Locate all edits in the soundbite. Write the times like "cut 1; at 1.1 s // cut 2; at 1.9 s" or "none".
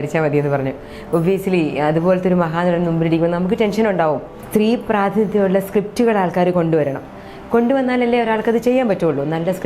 cut 1; at 4.3 s